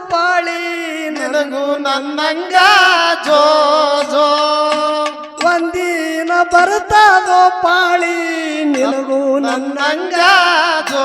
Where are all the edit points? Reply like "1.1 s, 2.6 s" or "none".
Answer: none